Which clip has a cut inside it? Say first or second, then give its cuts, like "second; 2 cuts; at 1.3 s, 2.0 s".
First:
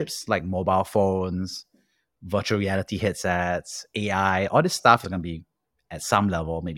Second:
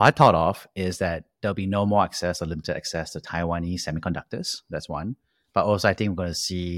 first; 1 cut; at 5.0 s